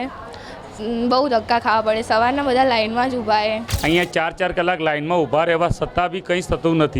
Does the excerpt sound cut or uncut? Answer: cut